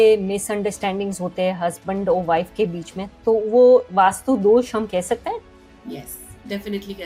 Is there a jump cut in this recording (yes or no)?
no